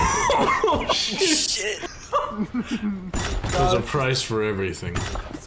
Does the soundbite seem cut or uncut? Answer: cut